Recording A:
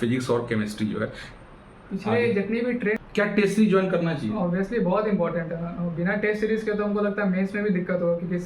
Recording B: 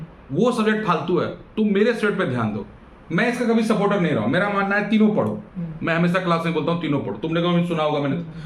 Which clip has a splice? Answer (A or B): A